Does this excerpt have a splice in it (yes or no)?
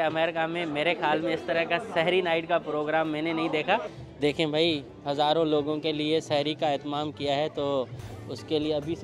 yes